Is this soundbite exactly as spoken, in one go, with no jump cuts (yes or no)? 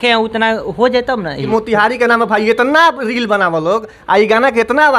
no